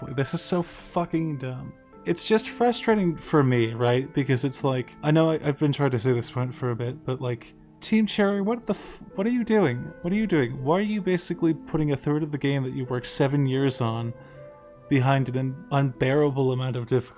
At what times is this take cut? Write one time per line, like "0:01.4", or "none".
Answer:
0:15.6